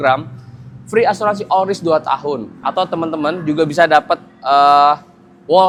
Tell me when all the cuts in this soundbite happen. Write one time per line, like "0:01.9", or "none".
none